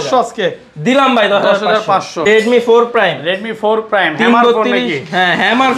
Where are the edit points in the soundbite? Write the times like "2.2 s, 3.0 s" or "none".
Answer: 2.3 s